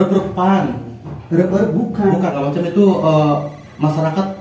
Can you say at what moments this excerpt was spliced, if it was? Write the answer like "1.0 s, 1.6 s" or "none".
2.3 s